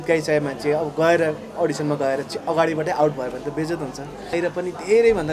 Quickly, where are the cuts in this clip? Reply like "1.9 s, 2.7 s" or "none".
4.3 s